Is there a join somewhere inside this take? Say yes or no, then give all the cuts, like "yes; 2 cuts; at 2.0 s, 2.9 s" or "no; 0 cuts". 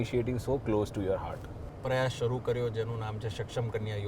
yes; 1 cut; at 1.7 s